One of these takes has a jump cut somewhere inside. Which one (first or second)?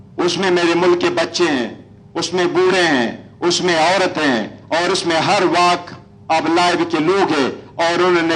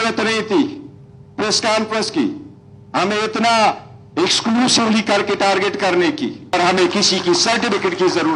second